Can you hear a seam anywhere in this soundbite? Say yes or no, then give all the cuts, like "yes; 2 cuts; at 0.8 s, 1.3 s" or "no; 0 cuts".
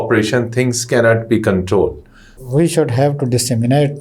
yes; 1 cut; at 2.3 s